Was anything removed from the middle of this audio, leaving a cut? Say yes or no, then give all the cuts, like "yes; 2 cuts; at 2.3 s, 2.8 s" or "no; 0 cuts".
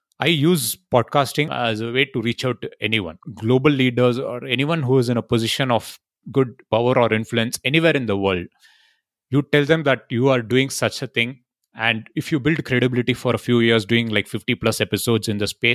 yes; 2 cuts; at 1.5 s, 3.1 s